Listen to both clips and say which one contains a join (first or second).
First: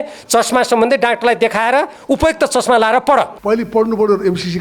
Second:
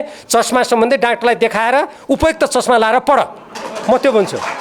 first